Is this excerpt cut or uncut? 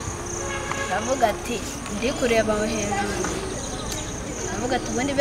uncut